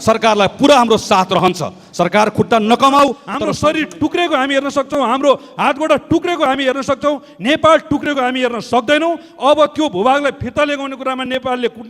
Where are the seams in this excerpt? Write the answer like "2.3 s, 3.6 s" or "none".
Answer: 3.3 s